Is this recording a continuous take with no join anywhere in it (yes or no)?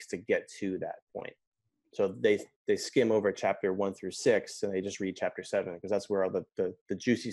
yes